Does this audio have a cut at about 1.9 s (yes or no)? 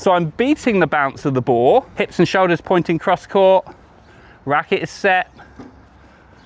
yes